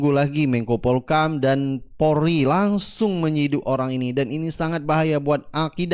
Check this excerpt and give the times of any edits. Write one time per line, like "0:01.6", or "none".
none